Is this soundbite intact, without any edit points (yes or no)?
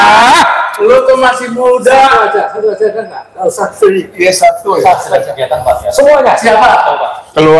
yes